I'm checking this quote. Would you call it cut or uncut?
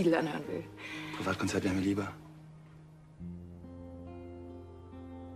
cut